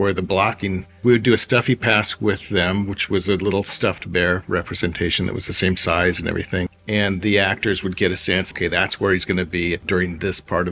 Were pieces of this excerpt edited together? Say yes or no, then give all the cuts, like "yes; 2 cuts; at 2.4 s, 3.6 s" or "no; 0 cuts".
yes; 3 cuts; at 0.9 s, 6.7 s, 8.5 s